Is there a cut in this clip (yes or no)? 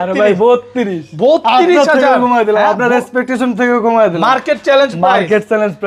no